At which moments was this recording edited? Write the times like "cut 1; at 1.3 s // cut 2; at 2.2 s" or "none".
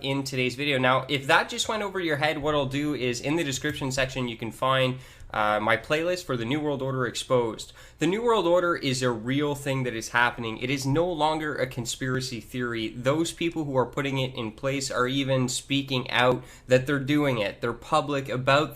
cut 1; at 1.2 s